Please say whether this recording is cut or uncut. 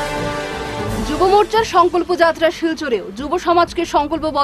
cut